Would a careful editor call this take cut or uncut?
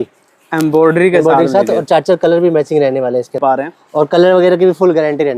cut